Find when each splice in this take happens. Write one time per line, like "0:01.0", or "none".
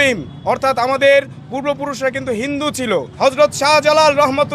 0:03.1